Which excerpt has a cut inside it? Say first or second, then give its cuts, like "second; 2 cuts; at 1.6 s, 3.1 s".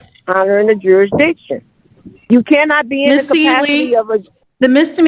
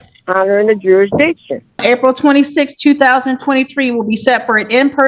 second; 1 cut; at 1.8 s